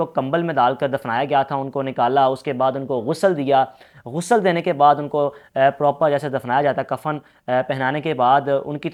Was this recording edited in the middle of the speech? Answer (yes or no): no